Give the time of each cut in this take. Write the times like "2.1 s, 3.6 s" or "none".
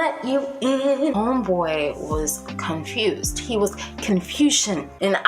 1.1 s